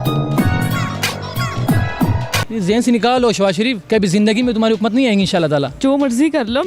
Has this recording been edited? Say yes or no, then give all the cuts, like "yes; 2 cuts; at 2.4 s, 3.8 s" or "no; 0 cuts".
yes; 2 cuts; at 2.5 s, 5.7 s